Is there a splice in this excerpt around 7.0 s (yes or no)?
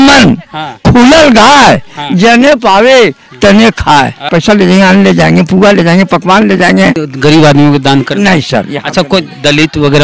yes